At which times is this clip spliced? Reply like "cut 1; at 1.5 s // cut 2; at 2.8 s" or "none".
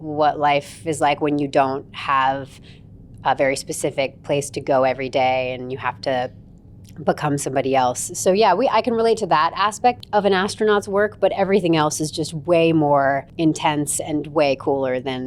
cut 1; at 10.0 s // cut 2; at 13.3 s